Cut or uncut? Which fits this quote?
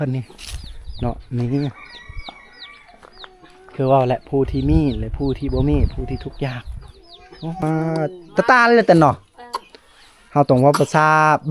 cut